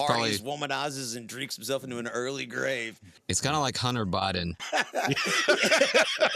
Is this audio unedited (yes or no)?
no